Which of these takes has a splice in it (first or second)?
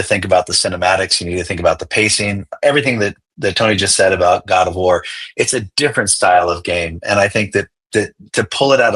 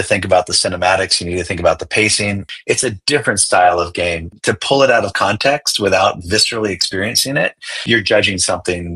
second